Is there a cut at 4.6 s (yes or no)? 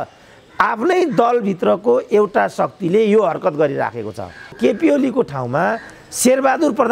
yes